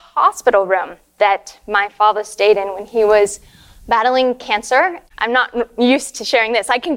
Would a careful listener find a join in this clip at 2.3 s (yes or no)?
no